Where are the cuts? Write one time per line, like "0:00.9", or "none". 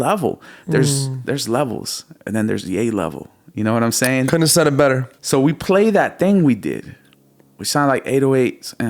0:05.1